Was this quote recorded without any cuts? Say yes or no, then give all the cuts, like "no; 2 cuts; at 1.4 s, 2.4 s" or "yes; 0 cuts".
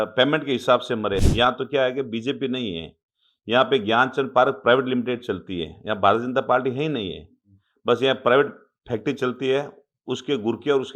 no; 1 cut; at 1.3 s